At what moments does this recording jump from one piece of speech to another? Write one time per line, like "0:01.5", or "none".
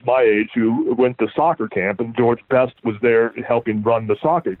0:01.0